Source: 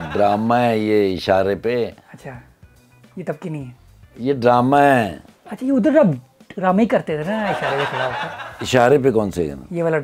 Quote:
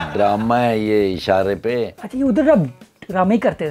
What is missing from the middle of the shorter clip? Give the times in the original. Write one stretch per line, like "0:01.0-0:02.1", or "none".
0:02.0-0:05.5